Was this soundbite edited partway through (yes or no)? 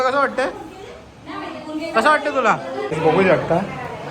yes